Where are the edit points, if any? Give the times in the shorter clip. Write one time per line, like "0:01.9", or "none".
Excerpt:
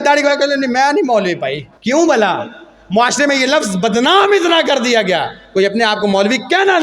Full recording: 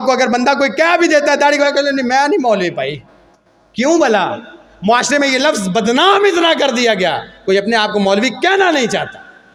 0:01.7